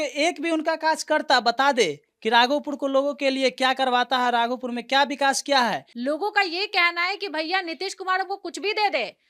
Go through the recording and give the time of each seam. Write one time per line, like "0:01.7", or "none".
0:05.9

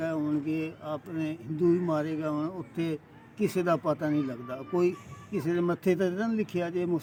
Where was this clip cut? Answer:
none

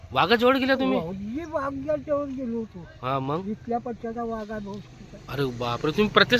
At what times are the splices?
none

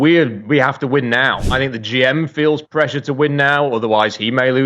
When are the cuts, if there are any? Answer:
0:01.4

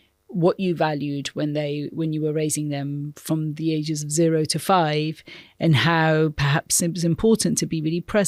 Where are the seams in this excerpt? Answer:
none

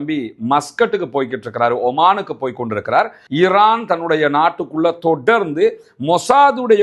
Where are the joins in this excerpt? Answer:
0:03.2

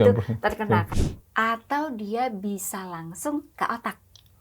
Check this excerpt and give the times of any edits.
0:00.9

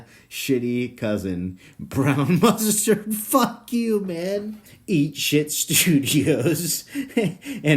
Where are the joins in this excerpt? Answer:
0:04.6

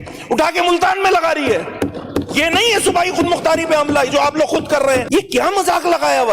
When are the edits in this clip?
0:05.1

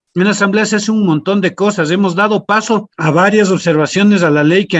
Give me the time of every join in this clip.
0:02.9

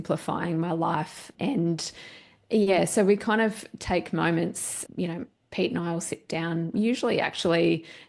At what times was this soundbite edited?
none

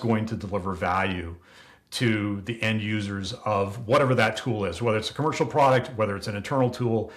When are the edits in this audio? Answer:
none

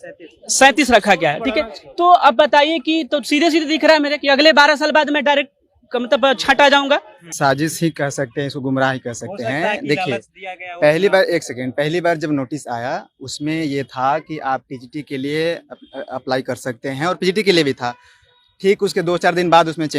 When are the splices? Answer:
0:07.3

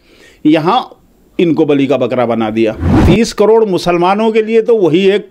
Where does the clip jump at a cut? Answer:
0:02.9

